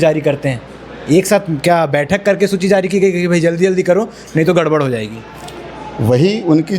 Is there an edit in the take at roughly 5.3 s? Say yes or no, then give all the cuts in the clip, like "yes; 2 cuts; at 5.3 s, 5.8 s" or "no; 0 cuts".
no; 0 cuts